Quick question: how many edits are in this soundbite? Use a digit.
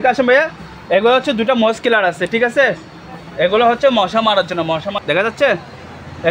1